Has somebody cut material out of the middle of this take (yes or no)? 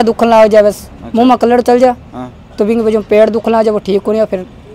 no